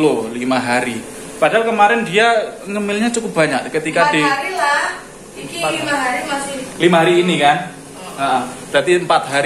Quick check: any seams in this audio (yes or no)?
no